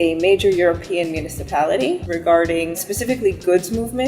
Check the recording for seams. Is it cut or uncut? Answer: cut